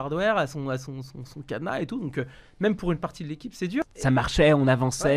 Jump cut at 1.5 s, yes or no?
no